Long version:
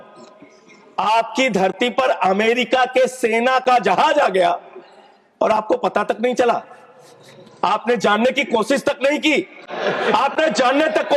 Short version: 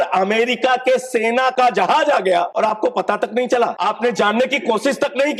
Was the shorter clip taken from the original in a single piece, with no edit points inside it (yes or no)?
no